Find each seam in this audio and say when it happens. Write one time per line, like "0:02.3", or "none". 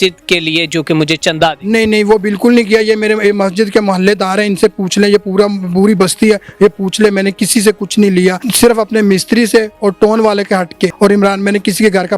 0:08.4
0:10.9